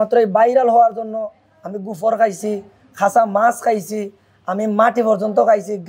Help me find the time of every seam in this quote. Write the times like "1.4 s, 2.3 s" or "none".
none